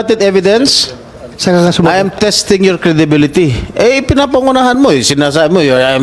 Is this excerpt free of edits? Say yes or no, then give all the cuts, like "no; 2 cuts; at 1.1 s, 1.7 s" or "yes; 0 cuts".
no; 1 cut; at 1.3 s